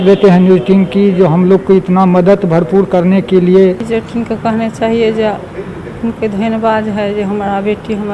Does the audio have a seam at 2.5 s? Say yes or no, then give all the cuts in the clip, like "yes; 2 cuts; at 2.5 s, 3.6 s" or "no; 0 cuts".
no; 1 cut; at 3.8 s